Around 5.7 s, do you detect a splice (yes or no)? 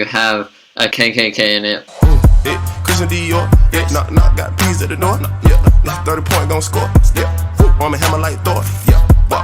no